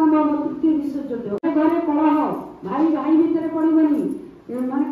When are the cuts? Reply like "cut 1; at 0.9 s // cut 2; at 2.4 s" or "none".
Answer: none